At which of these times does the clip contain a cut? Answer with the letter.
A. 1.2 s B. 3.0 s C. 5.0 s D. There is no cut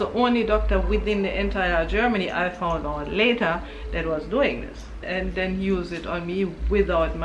C